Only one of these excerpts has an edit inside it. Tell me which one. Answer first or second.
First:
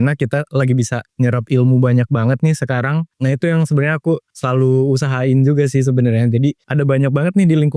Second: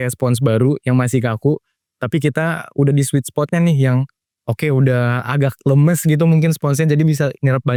first